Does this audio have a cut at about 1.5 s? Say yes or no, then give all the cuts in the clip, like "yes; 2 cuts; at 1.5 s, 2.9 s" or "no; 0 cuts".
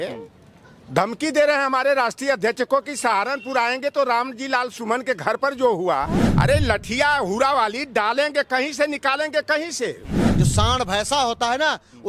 no; 2 cuts; at 6.2 s, 10.2 s